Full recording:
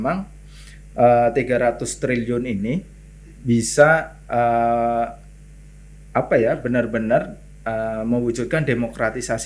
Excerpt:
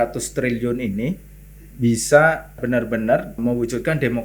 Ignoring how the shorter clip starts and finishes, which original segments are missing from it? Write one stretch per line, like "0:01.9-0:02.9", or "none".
0:04.2-0:06.6
0:07.4-0:08.0